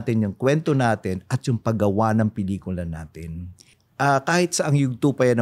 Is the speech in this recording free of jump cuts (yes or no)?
no